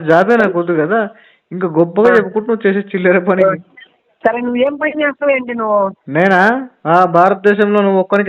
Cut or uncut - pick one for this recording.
cut